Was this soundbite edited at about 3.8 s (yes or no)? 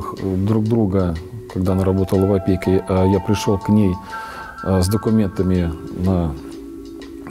no